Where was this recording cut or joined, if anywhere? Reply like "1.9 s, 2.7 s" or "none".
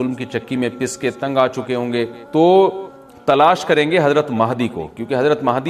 2.2 s